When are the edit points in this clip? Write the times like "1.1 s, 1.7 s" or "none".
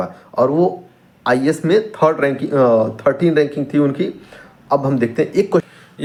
none

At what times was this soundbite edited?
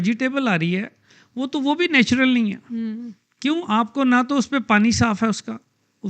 none

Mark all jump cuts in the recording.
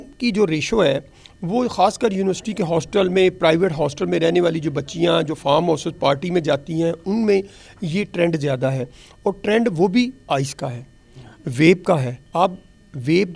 none

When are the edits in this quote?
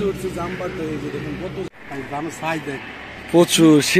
1.7 s

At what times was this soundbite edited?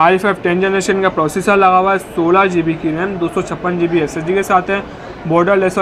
none

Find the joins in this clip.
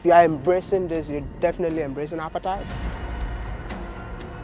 none

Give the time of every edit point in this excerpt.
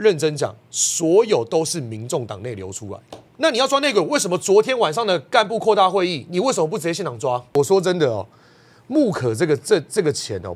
3.2 s, 7.5 s

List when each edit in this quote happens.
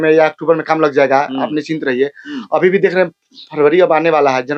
none

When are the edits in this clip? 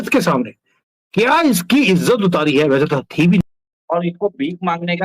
3.4 s

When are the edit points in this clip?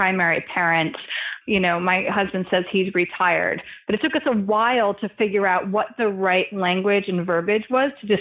1.4 s

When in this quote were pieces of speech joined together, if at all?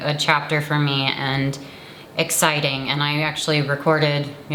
none

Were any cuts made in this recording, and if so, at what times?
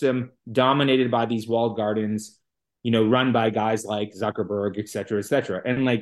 none

